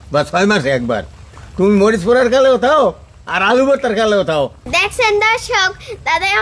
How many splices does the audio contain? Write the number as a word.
two